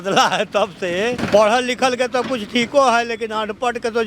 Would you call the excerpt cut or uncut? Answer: cut